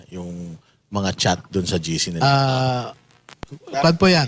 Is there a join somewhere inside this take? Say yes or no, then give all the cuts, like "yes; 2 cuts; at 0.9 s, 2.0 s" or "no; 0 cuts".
no; 0 cuts